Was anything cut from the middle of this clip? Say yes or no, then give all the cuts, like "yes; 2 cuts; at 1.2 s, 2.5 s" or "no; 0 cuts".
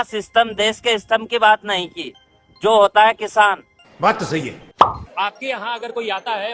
yes; 1 cut; at 4.8 s